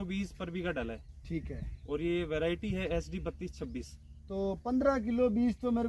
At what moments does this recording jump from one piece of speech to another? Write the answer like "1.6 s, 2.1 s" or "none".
none